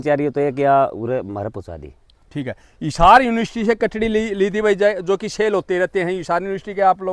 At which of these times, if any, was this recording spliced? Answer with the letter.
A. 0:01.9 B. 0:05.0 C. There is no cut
C